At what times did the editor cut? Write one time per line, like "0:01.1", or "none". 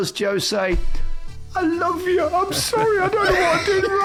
none